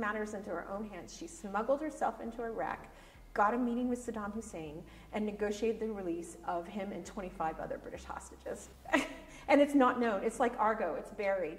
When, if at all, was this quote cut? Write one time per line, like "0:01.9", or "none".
none